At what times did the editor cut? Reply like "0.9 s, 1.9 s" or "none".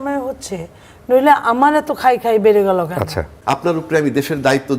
3.3 s